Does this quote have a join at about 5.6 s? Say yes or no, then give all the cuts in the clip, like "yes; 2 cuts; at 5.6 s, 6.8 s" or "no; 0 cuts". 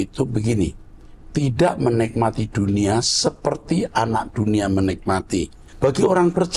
yes; 1 cut; at 5.6 s